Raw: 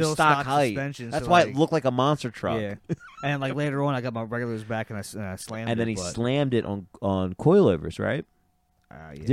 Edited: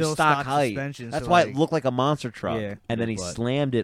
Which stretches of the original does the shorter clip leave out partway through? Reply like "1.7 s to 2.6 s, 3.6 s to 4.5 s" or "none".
2.8 s to 5.6 s